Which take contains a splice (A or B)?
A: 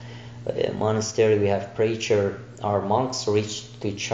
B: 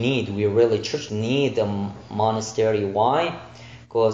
B